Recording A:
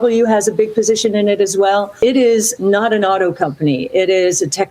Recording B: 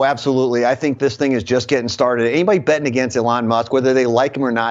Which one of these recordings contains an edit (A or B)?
A